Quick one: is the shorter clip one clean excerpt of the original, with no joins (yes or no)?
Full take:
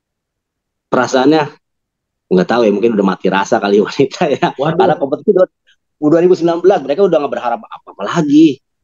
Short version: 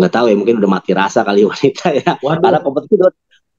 yes